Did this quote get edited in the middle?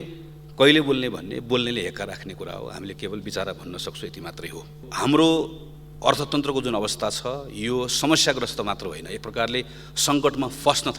yes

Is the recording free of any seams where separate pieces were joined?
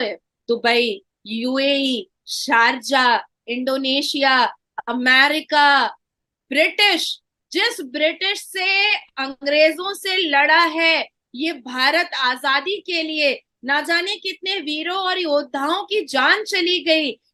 yes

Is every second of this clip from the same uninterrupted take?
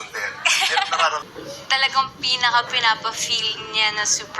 no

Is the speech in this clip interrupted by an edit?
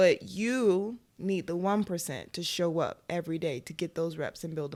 no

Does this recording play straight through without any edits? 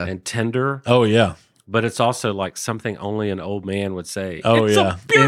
yes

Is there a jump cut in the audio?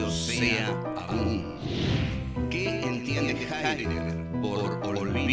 yes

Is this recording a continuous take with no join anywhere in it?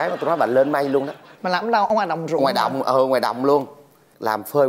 yes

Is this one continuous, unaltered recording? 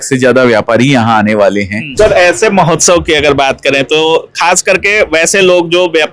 no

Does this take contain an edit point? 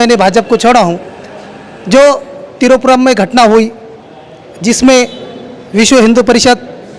no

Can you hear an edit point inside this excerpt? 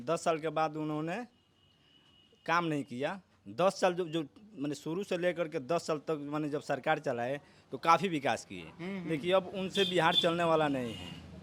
no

